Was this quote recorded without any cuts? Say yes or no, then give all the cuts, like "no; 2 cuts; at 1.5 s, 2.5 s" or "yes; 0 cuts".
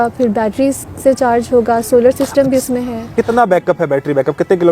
no; 1 cut; at 3.1 s